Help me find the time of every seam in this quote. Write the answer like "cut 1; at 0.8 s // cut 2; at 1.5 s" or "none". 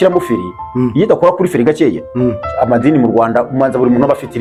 none